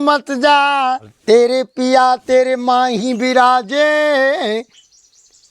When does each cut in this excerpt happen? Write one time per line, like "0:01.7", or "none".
0:01.1